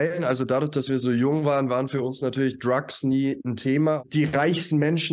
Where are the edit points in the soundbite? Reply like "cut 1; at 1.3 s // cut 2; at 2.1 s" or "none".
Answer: cut 1; at 4.0 s

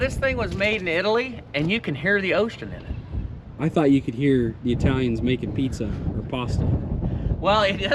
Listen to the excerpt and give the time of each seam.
none

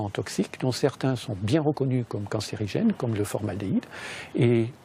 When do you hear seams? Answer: none

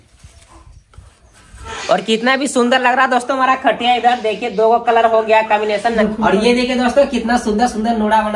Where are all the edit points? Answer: cut 1; at 1.6 s // cut 2; at 6.0 s

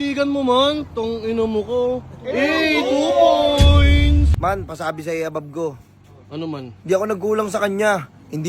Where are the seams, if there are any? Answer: cut 1; at 4.3 s

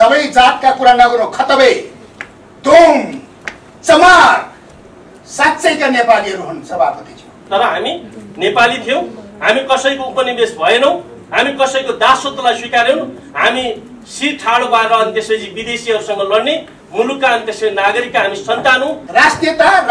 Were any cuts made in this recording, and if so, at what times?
cut 1; at 7.3 s // cut 2; at 19.0 s

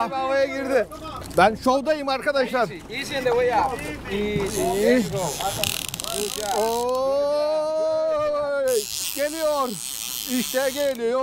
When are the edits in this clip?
none

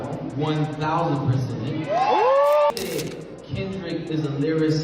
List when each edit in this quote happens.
cut 1; at 2.7 s

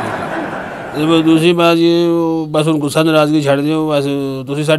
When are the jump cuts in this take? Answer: cut 1; at 1.0 s

